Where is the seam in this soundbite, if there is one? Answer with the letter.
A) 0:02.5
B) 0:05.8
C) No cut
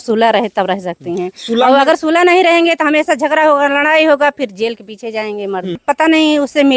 B